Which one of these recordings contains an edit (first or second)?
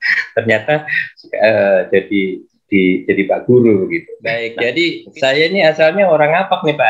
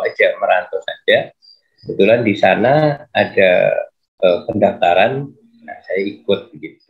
first